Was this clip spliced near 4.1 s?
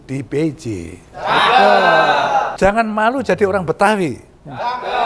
no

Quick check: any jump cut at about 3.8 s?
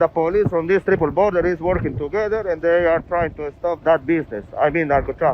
yes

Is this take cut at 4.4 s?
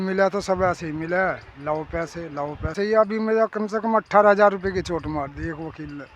no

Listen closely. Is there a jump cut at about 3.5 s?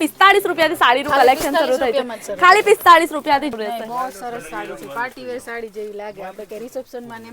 yes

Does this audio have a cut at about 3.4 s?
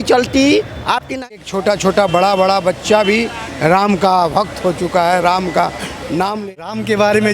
no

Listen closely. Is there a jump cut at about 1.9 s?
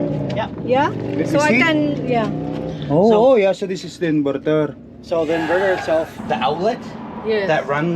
no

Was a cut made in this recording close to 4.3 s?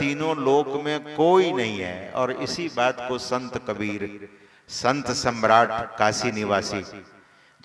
no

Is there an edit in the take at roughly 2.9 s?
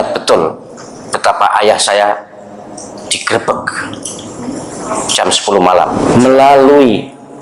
no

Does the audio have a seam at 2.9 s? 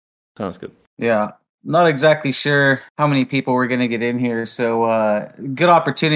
yes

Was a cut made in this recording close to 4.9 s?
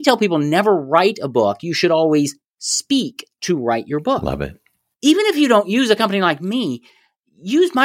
yes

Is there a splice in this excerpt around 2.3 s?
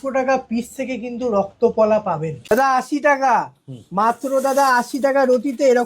yes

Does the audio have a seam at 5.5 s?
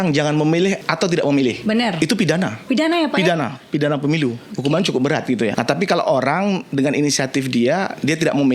yes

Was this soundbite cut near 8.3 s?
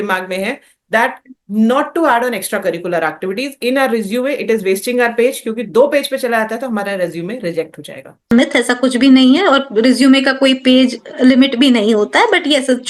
yes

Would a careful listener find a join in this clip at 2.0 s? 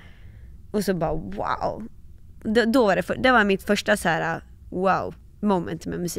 no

